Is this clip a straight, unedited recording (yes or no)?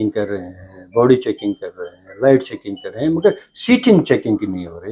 yes